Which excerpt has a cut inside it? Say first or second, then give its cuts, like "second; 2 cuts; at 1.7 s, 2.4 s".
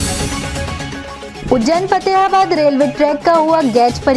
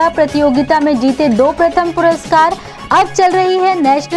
first; 1 cut; at 1.3 s